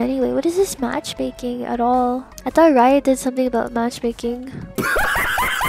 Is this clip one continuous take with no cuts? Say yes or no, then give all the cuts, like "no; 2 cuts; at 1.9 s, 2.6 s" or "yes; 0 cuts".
yes; 0 cuts